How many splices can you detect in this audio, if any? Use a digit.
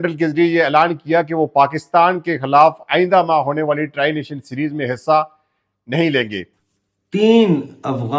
1